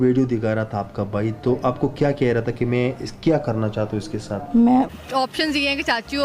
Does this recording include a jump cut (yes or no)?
yes